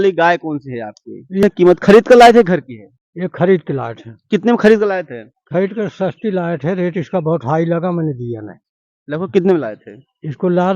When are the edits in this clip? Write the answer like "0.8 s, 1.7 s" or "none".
1.4 s